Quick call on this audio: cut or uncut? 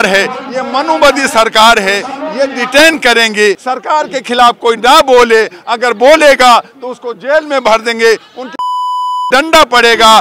cut